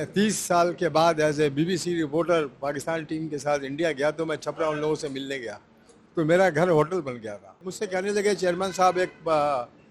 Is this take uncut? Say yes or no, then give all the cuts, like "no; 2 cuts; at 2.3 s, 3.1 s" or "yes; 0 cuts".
no; 1 cut; at 7.7 s